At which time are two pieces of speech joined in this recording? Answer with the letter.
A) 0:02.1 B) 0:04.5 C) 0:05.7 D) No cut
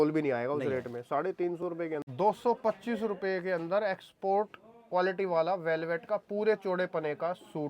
A